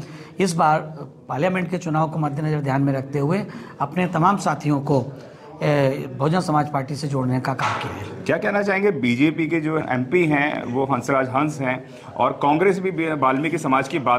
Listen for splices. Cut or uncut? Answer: uncut